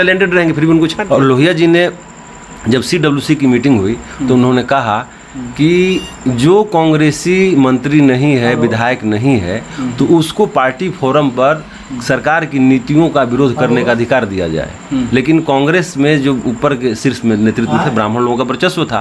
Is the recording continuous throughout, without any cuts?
no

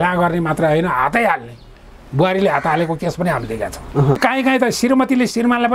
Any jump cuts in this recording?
yes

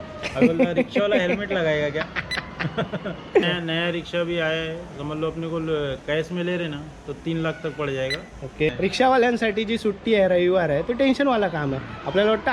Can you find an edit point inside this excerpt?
yes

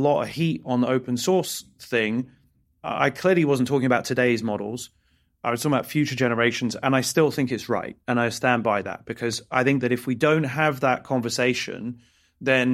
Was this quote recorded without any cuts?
yes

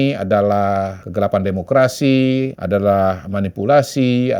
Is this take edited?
yes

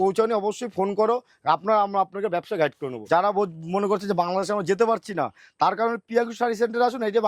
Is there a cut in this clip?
yes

